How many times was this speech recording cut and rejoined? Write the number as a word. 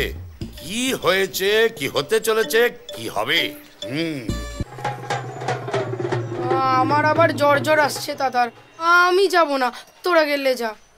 one